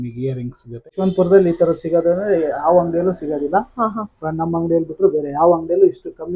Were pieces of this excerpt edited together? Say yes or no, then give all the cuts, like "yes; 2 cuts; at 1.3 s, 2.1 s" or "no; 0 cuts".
yes; 1 cut; at 0.9 s